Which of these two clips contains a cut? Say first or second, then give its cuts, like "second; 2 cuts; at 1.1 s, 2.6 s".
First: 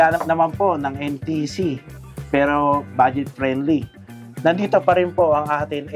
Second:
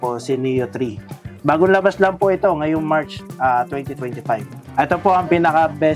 second; 1 cut; at 4.6 s